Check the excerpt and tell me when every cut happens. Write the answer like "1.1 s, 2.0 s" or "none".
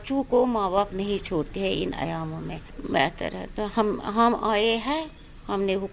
none